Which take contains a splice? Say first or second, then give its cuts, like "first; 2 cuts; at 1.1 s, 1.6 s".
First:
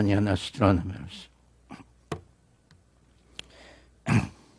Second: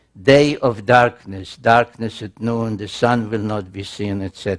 first; 1 cut; at 2.4 s